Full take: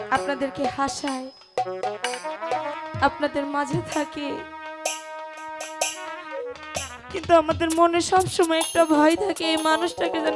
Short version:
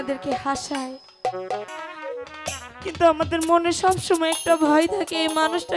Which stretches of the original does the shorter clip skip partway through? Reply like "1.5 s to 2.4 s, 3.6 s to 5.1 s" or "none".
2.0 s to 5.9 s